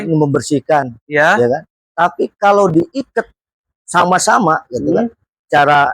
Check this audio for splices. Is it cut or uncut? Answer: uncut